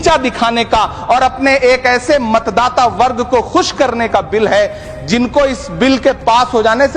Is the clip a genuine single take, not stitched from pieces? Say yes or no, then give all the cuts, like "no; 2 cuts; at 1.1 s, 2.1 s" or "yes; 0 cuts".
yes; 0 cuts